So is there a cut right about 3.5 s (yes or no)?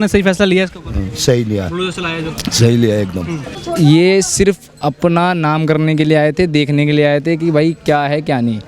yes